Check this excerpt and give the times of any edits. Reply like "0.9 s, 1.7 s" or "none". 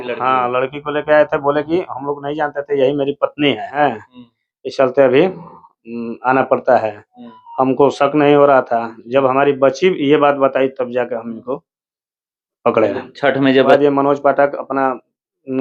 3.8 s, 13.7 s